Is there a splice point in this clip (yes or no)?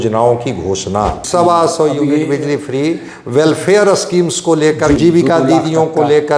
yes